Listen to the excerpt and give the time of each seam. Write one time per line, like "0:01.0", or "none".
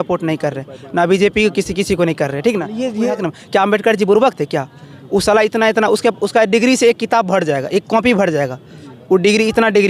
0:03.3